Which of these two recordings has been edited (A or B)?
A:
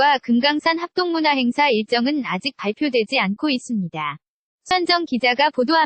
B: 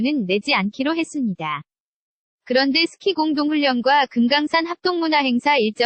A